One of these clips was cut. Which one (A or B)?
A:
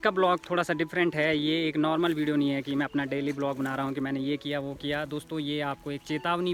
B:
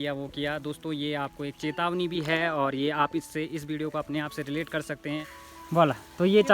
B